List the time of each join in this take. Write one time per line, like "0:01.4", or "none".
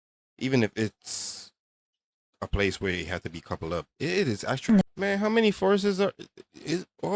0:04.7